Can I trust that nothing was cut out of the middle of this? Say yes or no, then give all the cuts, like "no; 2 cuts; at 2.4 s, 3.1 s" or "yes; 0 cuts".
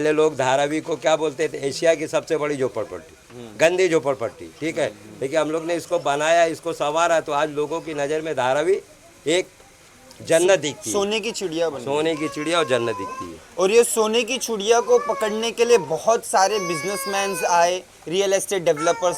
yes; 0 cuts